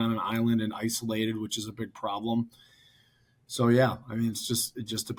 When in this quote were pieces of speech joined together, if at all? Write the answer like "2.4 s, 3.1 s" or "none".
none